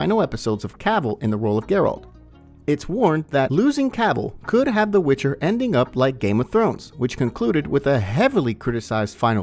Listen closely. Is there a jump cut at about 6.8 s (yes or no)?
no